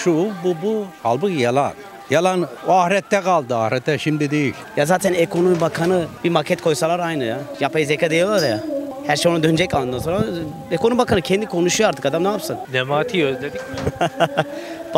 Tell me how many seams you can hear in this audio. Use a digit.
2